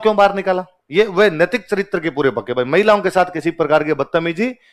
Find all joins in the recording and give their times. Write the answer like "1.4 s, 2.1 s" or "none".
none